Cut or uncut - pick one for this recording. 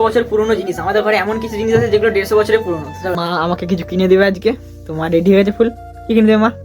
cut